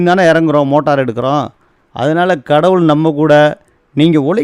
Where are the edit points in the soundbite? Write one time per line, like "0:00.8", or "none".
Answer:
0:01.3

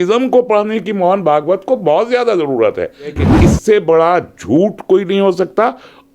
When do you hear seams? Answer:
0:03.2

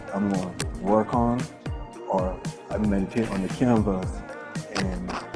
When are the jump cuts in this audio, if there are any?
0:04.4

